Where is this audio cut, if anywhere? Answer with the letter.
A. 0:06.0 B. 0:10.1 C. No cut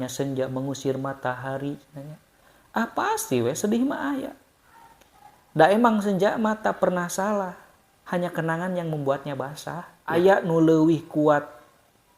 B